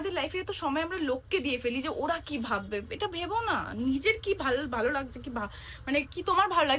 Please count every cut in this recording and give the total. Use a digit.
0